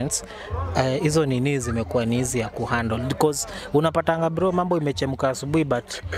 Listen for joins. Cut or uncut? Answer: uncut